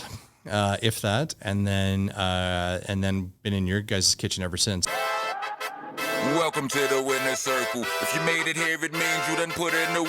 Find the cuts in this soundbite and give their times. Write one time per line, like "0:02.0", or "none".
0:04.8